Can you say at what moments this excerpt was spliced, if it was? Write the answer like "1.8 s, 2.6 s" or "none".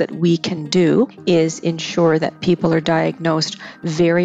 1.2 s